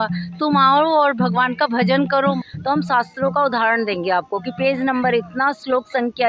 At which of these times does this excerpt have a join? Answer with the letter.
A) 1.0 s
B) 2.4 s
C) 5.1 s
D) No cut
B